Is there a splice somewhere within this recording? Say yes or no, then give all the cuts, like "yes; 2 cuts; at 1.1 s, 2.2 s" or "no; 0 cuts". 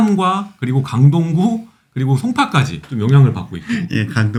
no; 0 cuts